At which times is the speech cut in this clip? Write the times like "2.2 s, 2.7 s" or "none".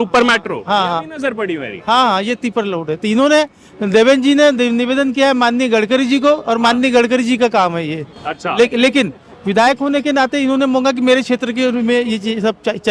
none